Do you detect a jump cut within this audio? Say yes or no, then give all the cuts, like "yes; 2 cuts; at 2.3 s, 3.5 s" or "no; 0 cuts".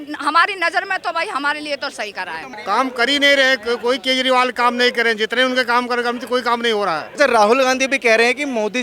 yes; 2 cuts; at 2.5 s, 7.1 s